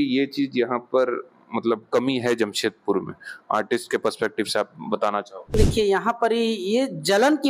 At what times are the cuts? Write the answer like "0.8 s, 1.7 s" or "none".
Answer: none